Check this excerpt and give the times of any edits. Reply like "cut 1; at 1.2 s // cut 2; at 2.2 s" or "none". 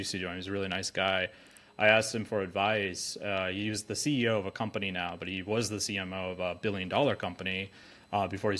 none